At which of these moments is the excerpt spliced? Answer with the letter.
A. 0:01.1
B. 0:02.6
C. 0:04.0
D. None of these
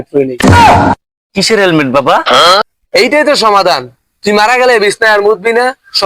B